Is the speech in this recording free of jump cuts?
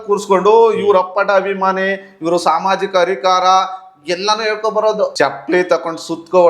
no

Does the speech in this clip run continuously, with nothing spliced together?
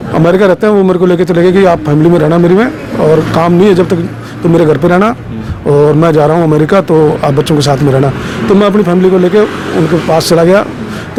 yes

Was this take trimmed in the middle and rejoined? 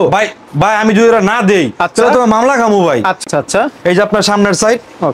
yes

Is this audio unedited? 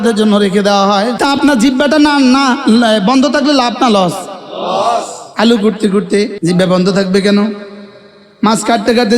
no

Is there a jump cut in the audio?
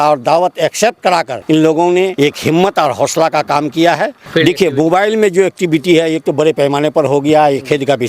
yes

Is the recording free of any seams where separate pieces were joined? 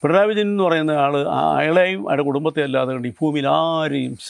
yes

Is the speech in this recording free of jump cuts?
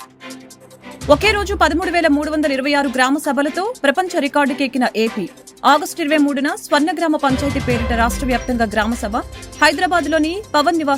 no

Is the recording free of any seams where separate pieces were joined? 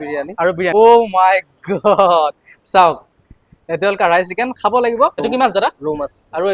no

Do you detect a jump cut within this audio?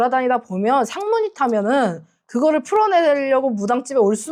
no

